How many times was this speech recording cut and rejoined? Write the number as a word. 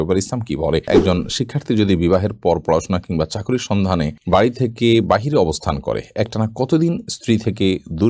two